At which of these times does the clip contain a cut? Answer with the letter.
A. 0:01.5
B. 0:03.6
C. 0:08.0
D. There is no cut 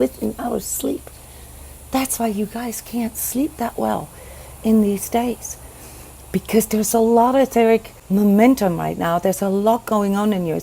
C